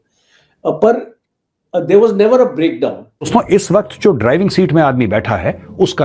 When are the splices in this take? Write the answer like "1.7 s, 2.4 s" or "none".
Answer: 3.3 s